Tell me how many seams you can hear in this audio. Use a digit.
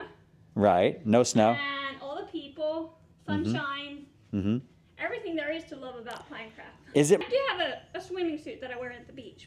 1